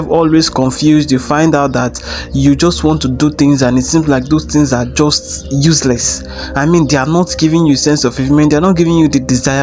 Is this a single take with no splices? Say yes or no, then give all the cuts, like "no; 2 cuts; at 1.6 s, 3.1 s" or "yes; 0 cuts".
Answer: yes; 0 cuts